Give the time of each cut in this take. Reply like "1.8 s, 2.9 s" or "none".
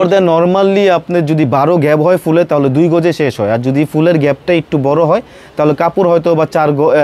none